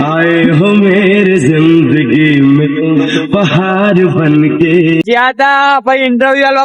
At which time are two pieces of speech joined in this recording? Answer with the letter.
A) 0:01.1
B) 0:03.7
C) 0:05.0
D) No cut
C